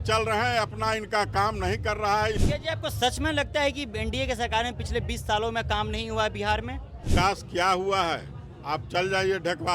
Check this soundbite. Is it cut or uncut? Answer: cut